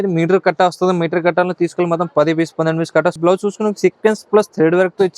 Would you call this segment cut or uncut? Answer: cut